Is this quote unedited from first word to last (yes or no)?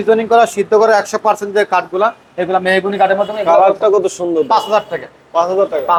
yes